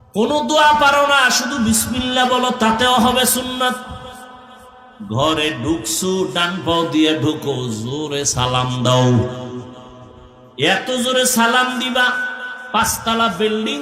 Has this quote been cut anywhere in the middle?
no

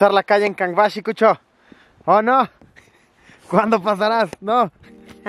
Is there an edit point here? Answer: no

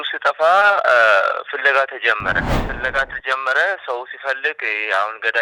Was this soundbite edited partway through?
yes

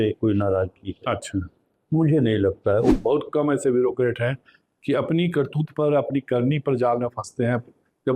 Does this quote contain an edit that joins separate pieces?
yes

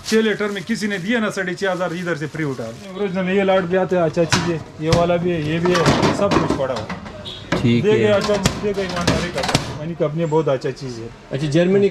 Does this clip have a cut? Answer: yes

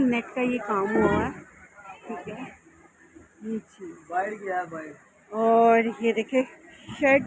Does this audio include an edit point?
no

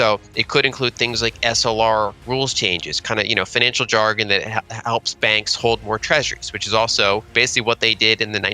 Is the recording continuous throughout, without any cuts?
no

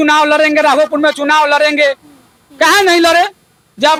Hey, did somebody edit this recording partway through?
no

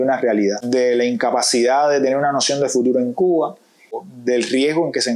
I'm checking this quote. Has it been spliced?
no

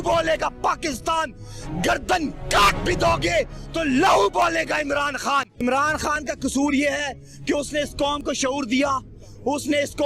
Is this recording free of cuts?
no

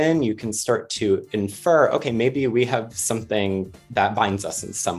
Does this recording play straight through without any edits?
yes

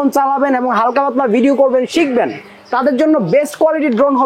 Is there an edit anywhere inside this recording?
no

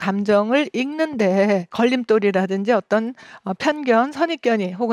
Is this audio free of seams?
no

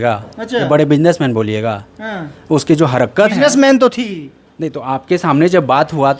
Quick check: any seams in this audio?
no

